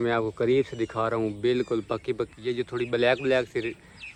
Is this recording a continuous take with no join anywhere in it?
yes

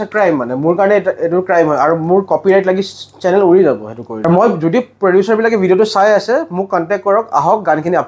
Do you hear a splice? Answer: no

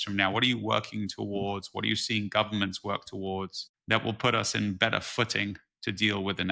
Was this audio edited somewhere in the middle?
no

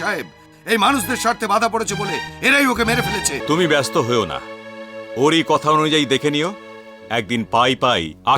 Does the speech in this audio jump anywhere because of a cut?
yes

